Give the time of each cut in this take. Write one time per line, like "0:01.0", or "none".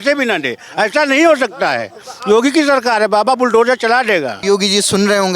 0:04.4